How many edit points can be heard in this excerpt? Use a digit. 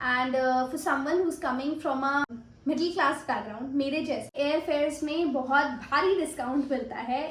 1